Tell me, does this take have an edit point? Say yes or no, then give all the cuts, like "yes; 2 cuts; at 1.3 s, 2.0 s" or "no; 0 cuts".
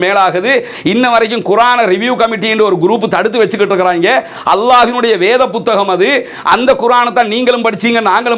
no; 0 cuts